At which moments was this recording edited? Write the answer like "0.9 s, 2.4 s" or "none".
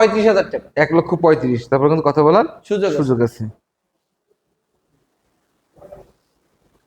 none